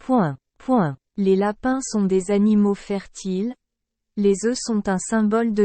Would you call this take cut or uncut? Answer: cut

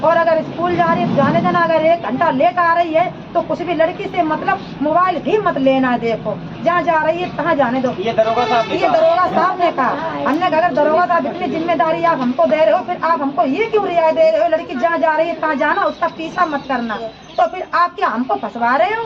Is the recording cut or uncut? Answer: uncut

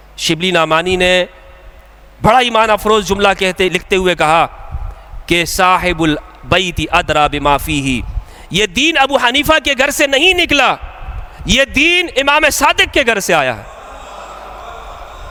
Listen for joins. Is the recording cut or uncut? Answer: uncut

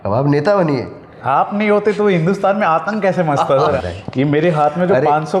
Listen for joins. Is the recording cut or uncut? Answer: cut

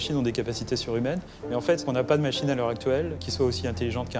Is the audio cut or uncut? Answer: cut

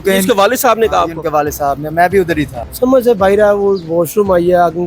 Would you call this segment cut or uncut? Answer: cut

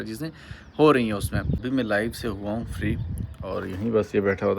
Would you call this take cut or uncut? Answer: cut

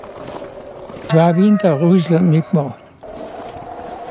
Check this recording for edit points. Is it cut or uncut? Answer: cut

